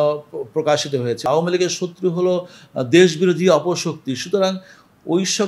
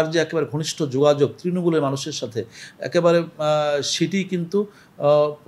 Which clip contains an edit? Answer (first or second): first